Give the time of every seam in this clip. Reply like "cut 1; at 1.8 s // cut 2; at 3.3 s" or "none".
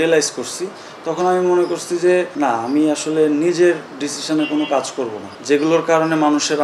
cut 1; at 2.3 s // cut 2; at 5.3 s